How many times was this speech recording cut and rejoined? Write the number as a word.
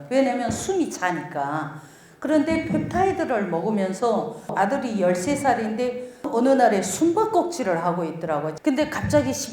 three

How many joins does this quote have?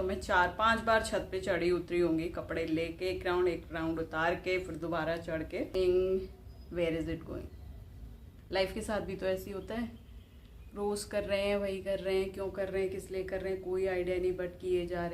one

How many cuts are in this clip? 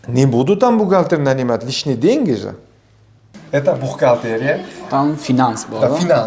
one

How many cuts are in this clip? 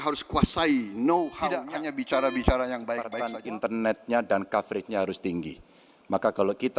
two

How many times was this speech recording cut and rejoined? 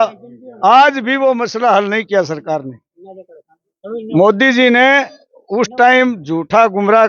zero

